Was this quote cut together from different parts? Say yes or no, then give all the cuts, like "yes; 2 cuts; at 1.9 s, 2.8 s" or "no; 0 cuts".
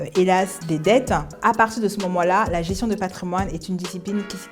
yes; 1 cut; at 1.3 s